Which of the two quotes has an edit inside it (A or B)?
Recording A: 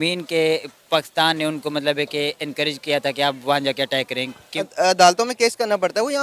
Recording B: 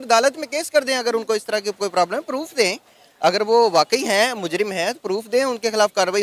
A